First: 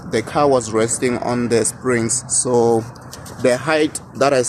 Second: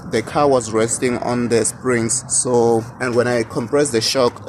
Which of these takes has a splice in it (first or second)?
second